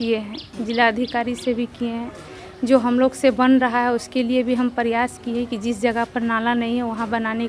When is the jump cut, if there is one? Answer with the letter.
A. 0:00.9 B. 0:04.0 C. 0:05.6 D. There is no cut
D